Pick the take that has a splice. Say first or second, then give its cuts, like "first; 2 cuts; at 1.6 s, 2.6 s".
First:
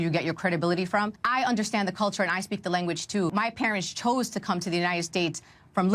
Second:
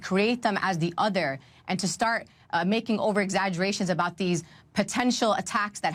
first; 2 cuts; at 1.2 s, 3.3 s